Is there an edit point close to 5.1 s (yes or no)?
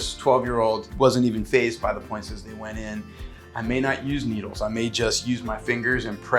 no